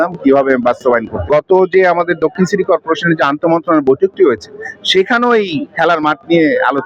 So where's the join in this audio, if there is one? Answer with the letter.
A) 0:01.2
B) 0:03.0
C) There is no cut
A